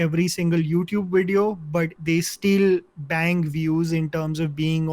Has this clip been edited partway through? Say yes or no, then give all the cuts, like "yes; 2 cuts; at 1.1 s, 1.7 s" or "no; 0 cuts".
yes; 1 cut; at 2.0 s